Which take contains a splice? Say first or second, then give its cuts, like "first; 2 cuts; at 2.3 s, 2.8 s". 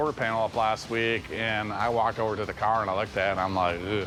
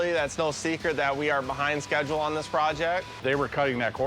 second; 1 cut; at 3.1 s